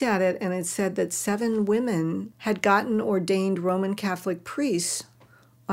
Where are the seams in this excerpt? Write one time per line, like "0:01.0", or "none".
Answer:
0:02.3